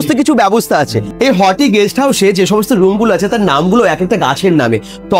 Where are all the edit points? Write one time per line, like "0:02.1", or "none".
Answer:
0:01.0